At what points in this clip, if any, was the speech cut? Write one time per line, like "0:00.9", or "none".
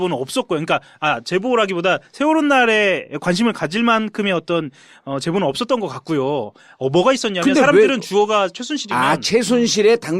0:01.1

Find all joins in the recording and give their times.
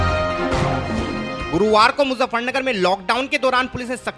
0:00.9

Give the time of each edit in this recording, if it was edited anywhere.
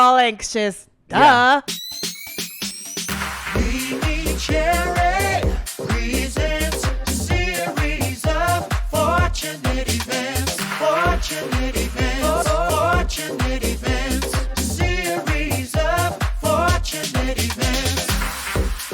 0:01.7

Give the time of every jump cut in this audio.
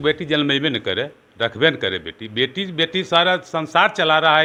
none

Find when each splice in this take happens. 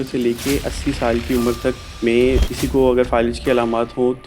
0:02.5

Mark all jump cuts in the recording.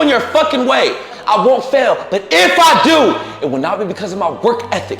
0:01.1

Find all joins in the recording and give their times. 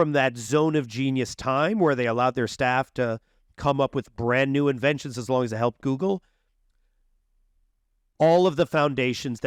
none

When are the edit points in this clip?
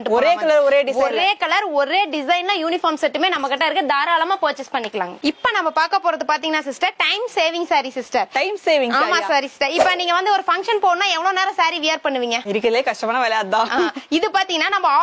none

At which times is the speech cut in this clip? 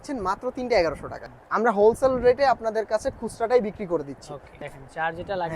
0:01.2
0:04.5

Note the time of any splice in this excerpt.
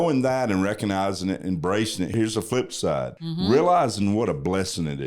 0:02.1
0:03.2

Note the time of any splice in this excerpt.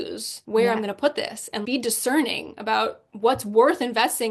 none

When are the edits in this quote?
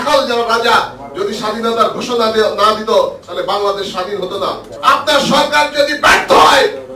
0:04.7

